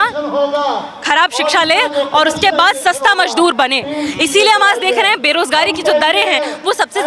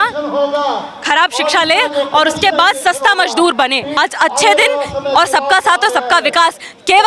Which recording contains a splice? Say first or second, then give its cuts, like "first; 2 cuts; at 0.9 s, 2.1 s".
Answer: second; 1 cut; at 3.9 s